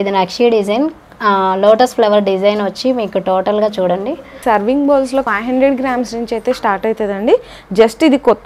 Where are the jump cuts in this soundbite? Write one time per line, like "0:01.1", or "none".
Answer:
0:04.4
0:05.3